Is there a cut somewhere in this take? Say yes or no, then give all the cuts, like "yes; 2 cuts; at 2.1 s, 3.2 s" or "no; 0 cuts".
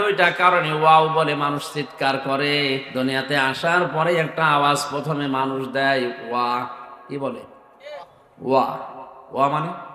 yes; 1 cut; at 2.9 s